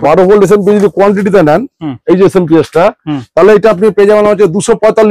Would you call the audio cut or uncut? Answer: uncut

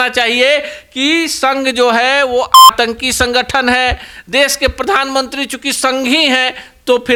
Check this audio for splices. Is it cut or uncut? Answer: uncut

